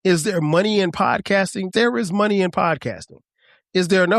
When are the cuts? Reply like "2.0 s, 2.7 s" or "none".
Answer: 1.7 s